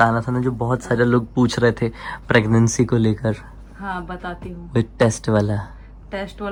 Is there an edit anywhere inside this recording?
no; 0 cuts

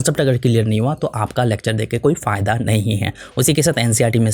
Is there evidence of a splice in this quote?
no; 0 cuts

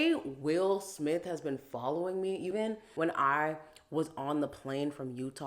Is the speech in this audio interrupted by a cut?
yes; 1 cut; at 2.5 s

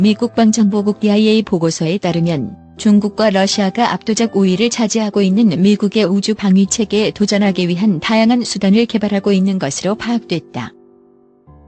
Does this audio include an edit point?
yes; 1 cut; at 10.8 s

